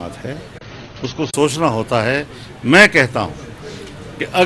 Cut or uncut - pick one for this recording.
uncut